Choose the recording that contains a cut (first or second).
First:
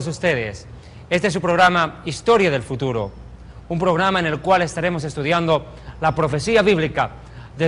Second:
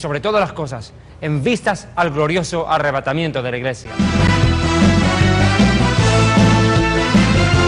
first